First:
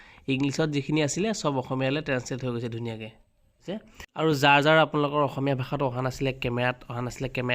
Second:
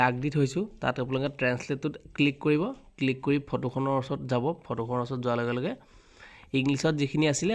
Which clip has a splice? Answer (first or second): first